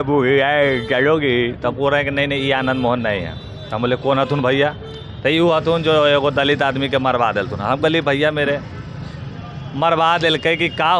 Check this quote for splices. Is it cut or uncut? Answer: uncut